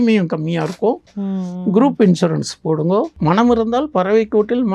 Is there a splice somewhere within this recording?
yes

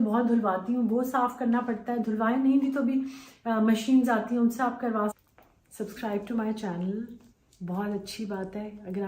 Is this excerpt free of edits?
no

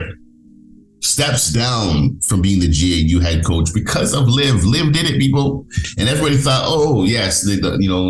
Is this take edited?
yes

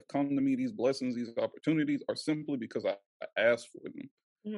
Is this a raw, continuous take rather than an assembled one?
yes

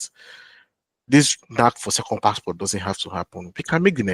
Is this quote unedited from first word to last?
yes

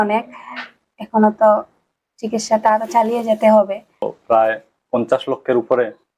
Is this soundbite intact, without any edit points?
no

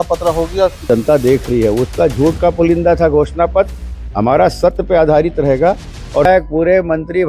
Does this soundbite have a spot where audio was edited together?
yes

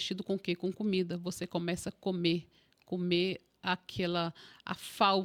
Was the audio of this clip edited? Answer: no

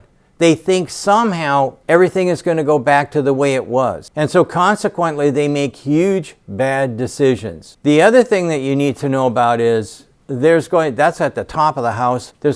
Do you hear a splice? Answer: no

